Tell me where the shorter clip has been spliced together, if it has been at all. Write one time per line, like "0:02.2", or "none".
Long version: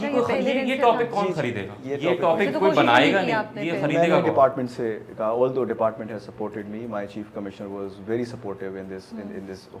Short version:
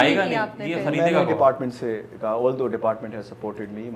none

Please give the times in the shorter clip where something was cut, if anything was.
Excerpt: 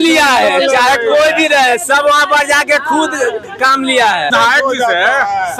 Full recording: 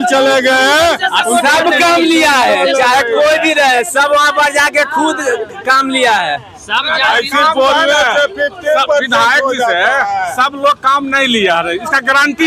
0:04.3

